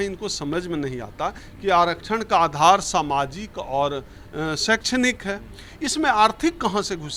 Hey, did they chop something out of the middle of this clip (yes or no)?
no